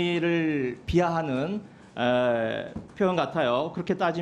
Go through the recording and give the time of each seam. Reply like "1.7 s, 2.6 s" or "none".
none